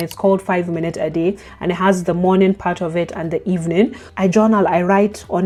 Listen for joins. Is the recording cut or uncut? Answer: uncut